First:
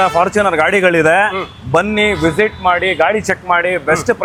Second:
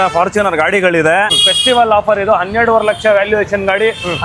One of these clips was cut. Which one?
second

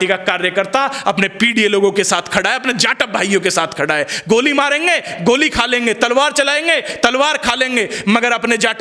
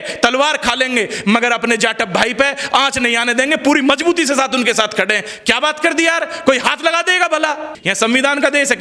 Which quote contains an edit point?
second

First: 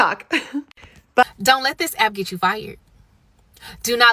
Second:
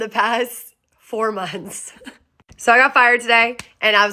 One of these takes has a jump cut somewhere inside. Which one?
first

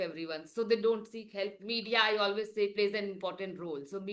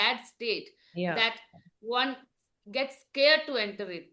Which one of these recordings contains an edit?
first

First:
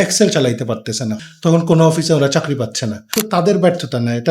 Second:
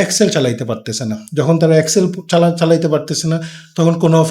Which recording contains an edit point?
first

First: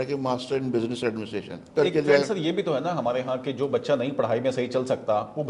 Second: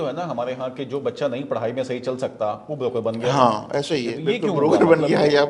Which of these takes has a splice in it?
first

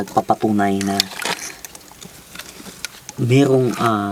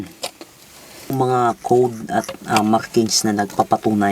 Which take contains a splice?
second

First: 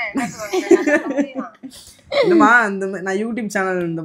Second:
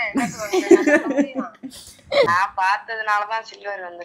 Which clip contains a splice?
second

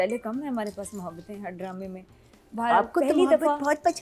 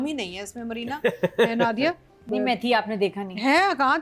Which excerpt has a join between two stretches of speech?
second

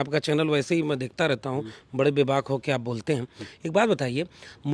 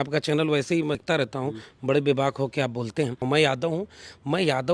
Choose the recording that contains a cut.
second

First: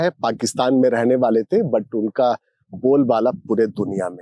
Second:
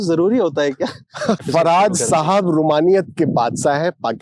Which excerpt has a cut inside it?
second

